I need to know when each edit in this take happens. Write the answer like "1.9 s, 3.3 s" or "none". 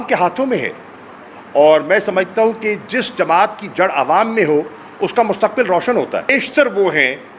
6.3 s